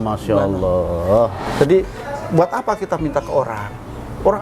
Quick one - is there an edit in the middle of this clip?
yes; 1 cut; at 1.4 s

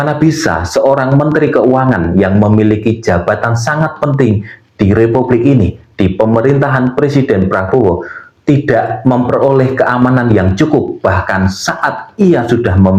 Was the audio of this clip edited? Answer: no; 0 cuts

